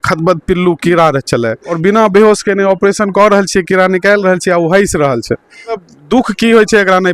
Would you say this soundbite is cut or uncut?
cut